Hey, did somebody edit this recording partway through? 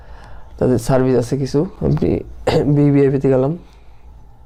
no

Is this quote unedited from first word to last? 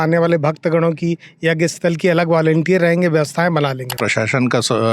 no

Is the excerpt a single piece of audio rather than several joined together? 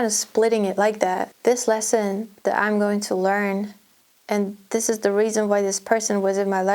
no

